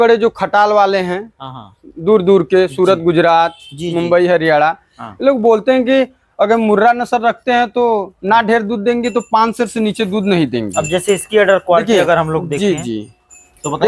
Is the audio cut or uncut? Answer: uncut